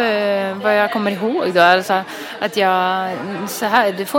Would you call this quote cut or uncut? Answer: uncut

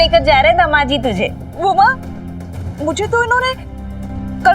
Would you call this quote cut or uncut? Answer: cut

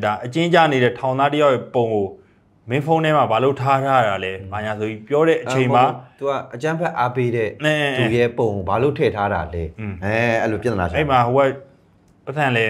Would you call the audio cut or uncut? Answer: uncut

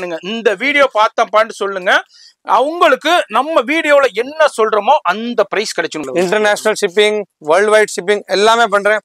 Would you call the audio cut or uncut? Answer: cut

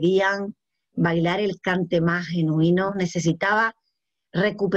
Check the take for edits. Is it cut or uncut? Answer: cut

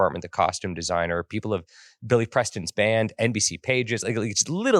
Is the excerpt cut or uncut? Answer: uncut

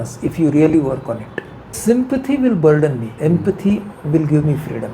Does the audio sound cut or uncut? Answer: cut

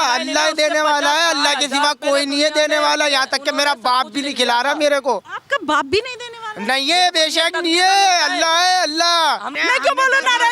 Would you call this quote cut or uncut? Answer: cut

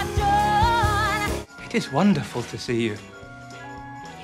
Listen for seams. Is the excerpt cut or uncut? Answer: cut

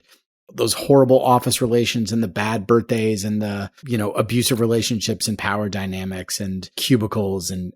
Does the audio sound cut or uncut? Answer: cut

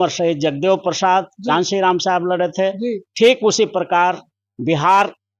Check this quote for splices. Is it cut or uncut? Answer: uncut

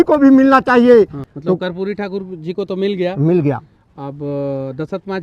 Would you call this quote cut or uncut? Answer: uncut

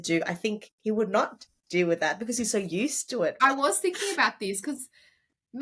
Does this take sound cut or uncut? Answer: cut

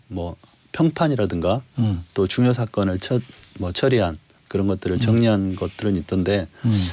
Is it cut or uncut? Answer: uncut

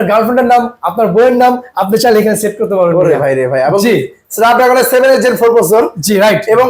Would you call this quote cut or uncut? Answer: uncut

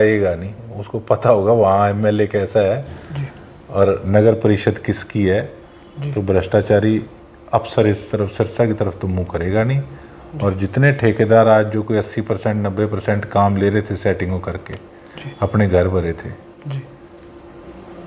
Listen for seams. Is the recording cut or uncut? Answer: uncut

